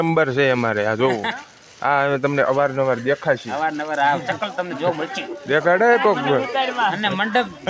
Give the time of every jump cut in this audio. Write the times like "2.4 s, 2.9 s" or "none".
none